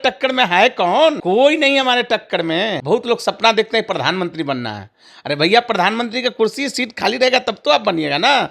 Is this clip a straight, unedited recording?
no; 2 cuts; at 1.2 s, 2.8 s

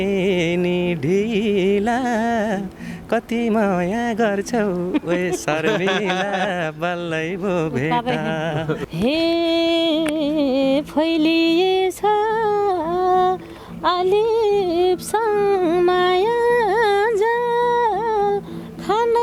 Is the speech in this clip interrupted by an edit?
yes; 1 cut; at 8.9 s

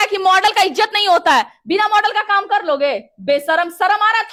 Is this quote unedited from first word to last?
yes; 0 cuts

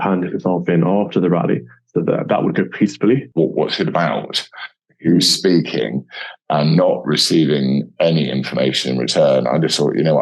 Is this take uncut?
no; 1 cut; at 3.3 s

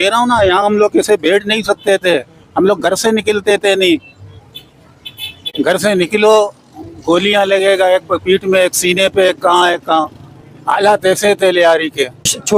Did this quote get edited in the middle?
no; 0 cuts

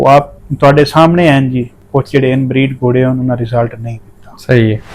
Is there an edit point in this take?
yes; 1 cut; at 1.8 s

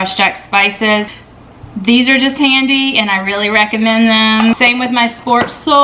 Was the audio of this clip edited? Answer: yes; 2 cuts; at 1.1 s, 4.6 s

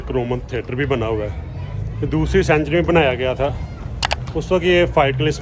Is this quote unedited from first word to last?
yes; 0 cuts

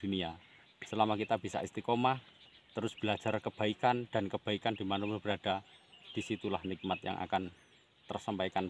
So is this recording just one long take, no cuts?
yes; 0 cuts

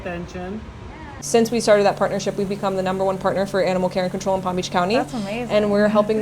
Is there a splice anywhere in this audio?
yes; 1 cut; at 1.2 s

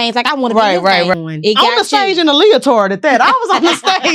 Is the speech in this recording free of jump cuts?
no; 1 cut; at 1.1 s

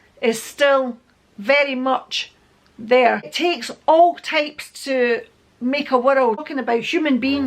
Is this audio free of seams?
no; 1 cut; at 6.4 s

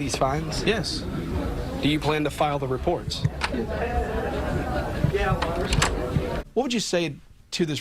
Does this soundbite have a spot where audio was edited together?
yes; 1 cut; at 6.4 s

